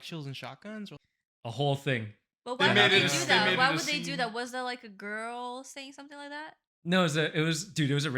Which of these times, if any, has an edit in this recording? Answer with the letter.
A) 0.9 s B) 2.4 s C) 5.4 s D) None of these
A